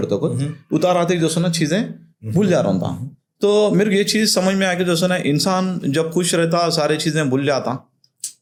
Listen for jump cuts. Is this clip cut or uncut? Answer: uncut